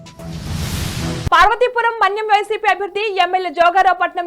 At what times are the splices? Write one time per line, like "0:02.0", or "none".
none